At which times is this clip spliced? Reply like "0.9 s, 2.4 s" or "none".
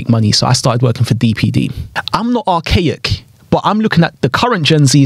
1.9 s